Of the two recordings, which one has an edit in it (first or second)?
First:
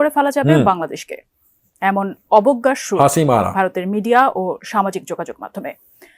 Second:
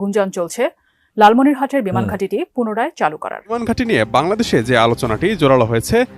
second